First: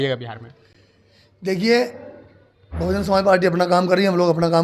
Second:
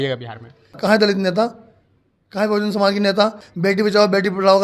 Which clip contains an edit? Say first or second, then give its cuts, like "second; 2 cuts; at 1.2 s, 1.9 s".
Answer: second; 2 cuts; at 0.8 s, 3.4 s